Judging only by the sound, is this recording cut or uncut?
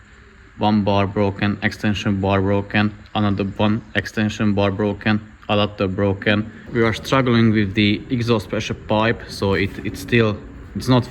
cut